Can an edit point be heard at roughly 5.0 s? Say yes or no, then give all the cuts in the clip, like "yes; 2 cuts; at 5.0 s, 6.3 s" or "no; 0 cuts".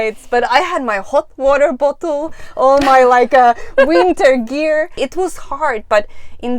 yes; 1 cut; at 5.0 s